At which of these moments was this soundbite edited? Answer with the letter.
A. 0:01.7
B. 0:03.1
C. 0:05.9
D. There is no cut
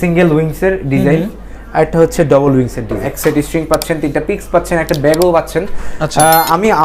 B